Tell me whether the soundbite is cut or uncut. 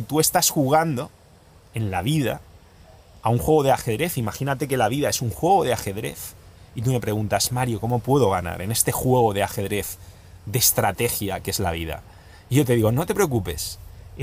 uncut